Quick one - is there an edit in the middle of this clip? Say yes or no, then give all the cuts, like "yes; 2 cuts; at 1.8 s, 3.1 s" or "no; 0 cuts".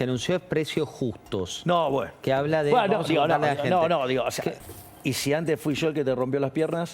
yes; 1 cut; at 4.6 s